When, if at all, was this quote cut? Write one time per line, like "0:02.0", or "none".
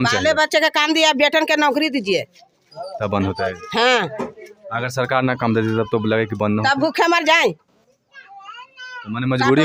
none